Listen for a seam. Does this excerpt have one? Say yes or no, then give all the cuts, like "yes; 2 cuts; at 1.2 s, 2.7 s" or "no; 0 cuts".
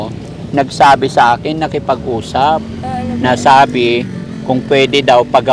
no; 0 cuts